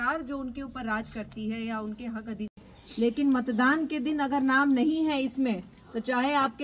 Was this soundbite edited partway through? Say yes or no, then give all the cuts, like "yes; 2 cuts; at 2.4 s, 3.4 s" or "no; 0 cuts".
yes; 1 cut; at 2.5 s